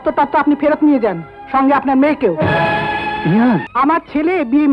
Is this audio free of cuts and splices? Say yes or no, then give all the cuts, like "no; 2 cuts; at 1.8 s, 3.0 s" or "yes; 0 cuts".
no; 1 cut; at 3.7 s